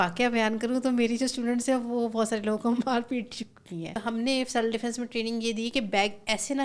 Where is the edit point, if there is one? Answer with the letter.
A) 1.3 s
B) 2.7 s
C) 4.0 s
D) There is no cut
C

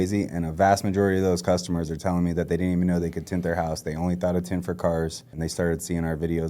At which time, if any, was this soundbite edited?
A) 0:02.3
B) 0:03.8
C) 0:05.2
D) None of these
C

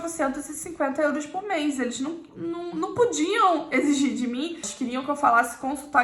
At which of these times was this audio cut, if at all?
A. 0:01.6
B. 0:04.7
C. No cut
B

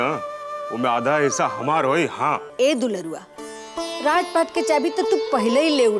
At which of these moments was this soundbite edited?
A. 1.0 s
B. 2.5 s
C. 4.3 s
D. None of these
B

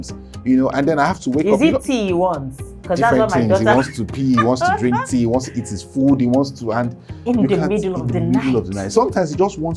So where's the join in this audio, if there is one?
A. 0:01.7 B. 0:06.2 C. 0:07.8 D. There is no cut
D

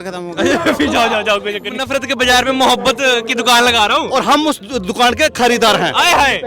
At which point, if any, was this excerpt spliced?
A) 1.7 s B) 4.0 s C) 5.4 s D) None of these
A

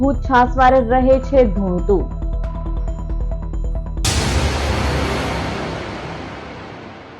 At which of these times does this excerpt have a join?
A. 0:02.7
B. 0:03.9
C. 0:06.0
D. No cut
B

